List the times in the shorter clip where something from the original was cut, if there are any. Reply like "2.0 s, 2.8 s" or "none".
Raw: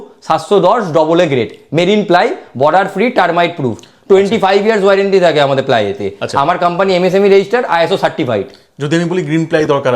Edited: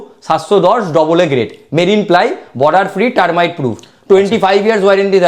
none